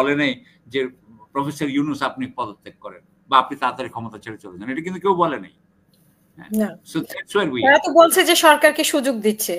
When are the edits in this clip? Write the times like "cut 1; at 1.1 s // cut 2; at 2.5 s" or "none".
none